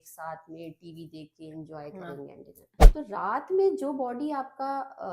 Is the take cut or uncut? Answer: cut